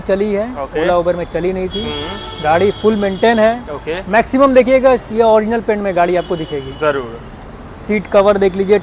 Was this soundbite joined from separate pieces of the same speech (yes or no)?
no